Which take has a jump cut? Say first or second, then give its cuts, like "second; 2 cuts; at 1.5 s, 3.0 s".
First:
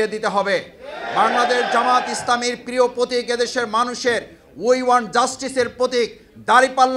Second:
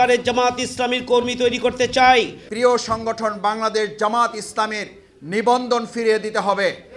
second; 1 cut; at 2.4 s